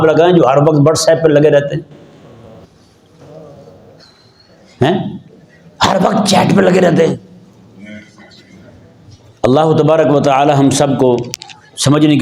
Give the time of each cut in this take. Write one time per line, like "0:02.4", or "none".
none